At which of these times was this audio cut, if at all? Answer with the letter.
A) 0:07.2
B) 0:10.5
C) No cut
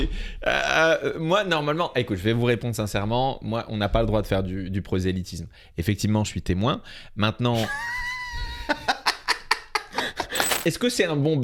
B